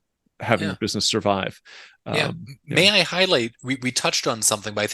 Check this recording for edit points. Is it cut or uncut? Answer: cut